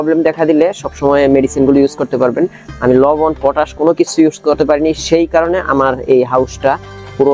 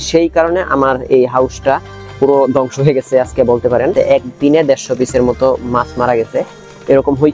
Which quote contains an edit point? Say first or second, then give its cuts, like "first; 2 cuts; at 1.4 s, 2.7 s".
second; 1 cut; at 3.9 s